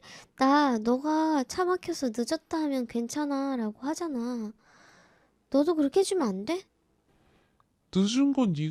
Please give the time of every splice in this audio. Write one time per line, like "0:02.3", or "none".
none